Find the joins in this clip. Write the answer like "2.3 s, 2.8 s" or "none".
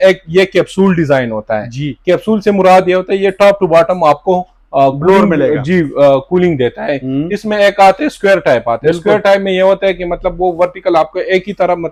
none